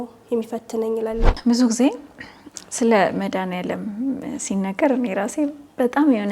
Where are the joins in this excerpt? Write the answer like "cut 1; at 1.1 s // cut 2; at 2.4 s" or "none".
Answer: cut 1; at 1.3 s